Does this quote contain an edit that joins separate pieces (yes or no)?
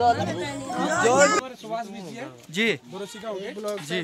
yes